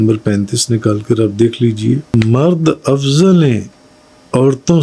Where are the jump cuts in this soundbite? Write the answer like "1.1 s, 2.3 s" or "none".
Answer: 2.0 s